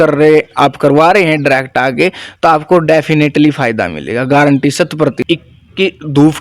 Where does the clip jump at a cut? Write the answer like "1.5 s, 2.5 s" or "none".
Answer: 5.2 s